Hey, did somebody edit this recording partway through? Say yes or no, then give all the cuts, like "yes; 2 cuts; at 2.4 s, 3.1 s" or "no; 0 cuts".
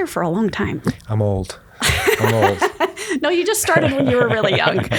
no; 0 cuts